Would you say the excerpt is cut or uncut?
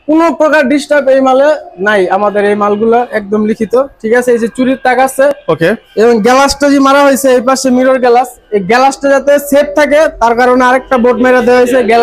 uncut